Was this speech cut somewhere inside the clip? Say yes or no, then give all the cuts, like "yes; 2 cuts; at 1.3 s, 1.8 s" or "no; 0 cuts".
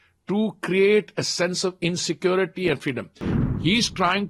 yes; 1 cut; at 3.2 s